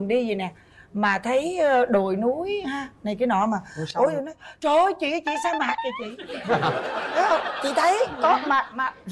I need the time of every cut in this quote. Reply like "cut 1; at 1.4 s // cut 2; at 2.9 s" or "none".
none